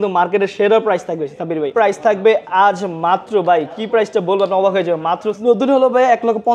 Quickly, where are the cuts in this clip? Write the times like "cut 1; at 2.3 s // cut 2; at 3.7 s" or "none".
cut 1; at 1.7 s // cut 2; at 5.3 s